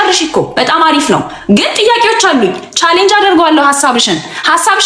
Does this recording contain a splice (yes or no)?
no